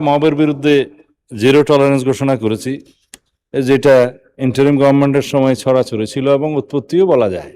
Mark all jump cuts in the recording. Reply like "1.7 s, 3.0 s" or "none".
none